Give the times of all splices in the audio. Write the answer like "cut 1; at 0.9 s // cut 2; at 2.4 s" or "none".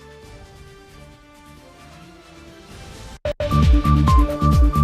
cut 1; at 3.3 s